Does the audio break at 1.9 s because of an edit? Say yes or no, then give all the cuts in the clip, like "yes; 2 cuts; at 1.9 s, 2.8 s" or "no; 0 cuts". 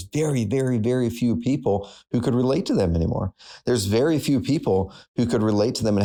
no; 0 cuts